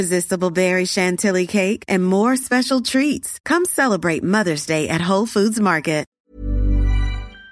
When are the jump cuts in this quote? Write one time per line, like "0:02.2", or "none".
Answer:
0:06.1